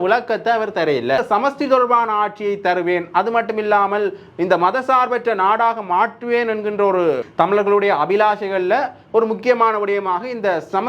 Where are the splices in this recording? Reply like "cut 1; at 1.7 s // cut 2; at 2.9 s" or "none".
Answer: cut 1; at 1.2 s // cut 2; at 7.2 s